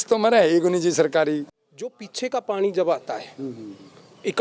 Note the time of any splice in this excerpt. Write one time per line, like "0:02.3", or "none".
0:01.5